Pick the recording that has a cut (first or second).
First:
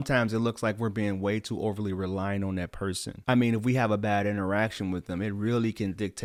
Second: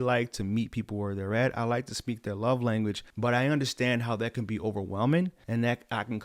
second